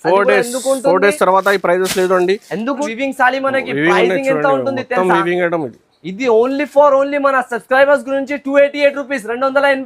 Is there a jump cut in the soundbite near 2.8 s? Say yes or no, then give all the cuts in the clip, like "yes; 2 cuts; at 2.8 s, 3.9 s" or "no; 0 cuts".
yes; 1 cut; at 2.8 s